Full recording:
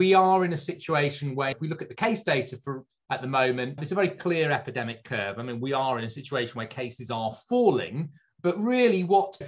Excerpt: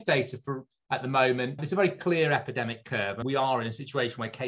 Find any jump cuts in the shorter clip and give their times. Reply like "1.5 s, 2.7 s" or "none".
3.2 s